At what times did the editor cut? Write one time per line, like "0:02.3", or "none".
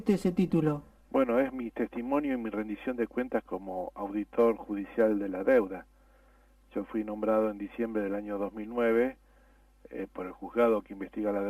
0:04.9